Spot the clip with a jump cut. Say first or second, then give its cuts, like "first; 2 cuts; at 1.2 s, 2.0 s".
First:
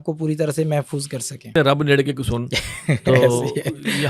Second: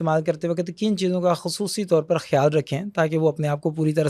first; 1 cut; at 1.5 s